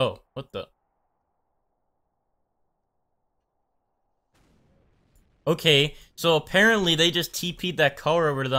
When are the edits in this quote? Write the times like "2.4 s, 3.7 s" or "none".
none